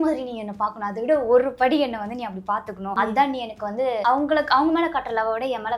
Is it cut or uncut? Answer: cut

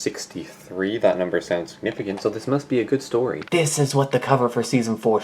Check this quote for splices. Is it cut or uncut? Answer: cut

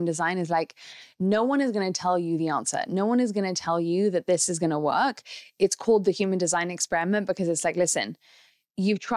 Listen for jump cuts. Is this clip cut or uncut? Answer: uncut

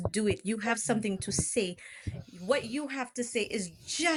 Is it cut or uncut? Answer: uncut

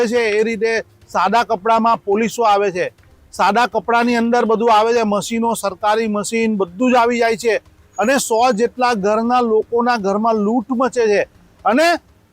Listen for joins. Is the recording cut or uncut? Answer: uncut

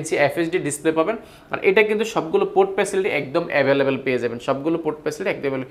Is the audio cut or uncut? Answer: uncut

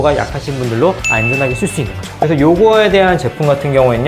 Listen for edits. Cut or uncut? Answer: uncut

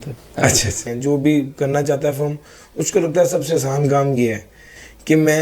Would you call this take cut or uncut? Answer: cut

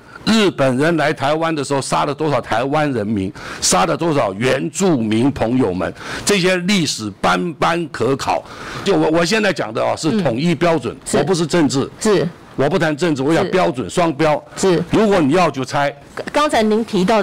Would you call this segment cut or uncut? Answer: cut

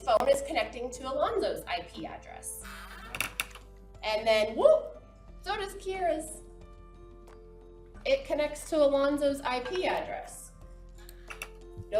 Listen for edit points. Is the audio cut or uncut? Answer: uncut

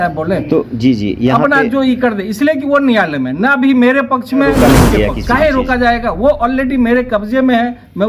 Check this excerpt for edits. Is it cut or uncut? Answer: cut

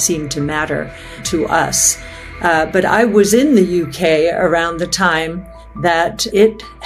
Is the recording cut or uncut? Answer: uncut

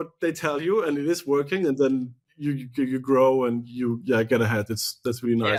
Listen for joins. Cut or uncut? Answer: uncut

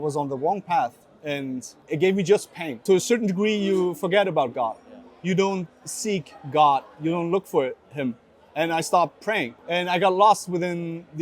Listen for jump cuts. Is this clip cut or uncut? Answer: cut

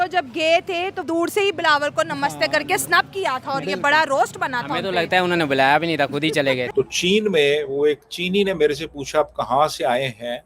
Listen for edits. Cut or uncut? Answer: cut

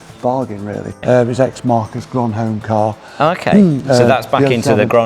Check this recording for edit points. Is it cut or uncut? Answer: cut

